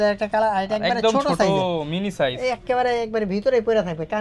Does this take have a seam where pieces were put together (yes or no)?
no